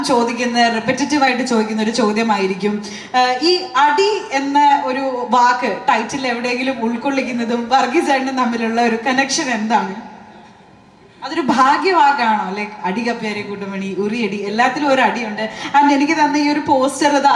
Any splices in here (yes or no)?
no